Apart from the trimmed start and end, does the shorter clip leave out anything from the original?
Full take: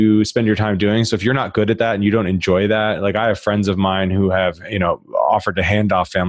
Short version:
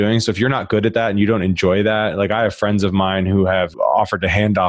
yes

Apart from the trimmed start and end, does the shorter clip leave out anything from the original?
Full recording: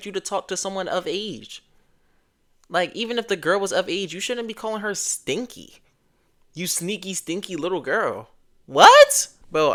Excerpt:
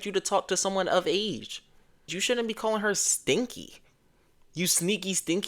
yes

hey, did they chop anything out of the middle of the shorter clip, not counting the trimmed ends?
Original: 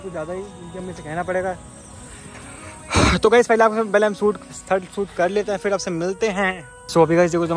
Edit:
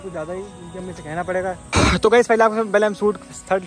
yes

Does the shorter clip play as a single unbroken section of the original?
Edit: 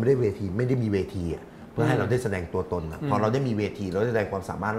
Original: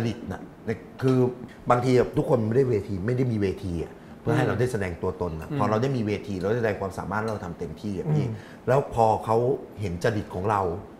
yes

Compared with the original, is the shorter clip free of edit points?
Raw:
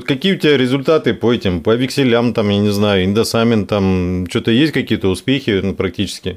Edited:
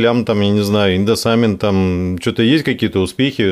yes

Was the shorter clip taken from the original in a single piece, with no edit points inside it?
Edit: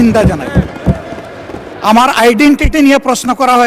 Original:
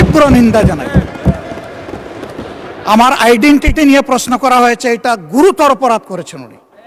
no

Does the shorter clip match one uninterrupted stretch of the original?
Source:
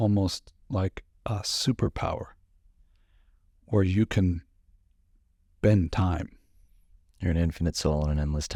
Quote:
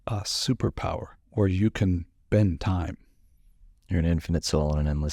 no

